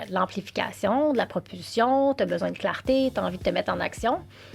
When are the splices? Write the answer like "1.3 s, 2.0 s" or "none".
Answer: none